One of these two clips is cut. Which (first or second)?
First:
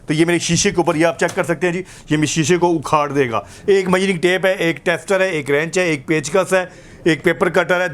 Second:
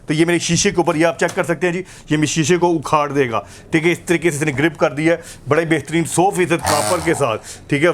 first